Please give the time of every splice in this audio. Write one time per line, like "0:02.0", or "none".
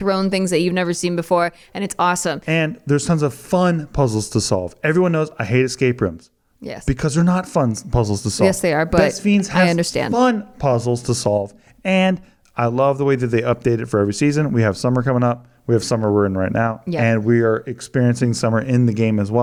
none